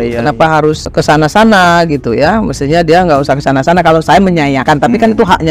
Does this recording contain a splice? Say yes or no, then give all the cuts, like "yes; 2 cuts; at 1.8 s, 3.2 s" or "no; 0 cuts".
yes; 2 cuts; at 0.8 s, 4.6 s